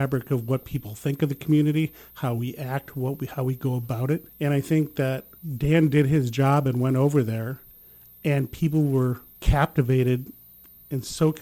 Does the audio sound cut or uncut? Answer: cut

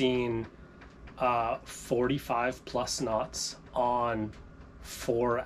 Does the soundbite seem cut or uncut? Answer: uncut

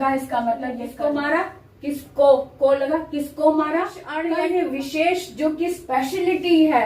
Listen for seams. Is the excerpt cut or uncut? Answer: cut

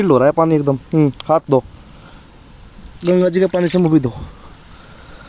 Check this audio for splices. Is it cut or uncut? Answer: cut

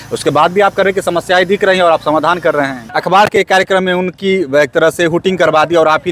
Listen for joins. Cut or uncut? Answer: cut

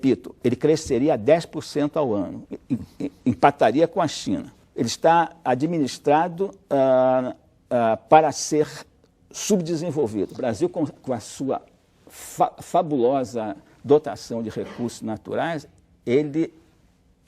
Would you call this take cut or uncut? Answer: cut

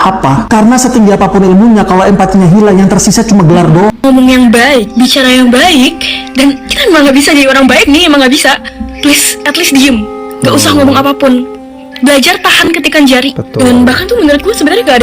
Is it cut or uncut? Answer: cut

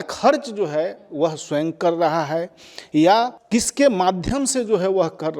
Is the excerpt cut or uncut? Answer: cut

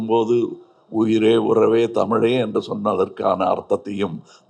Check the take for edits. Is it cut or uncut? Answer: uncut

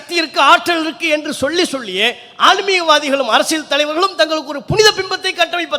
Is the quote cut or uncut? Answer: uncut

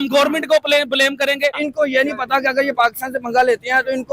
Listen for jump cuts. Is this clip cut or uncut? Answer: cut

